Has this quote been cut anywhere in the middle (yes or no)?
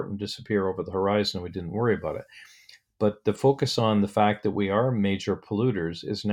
no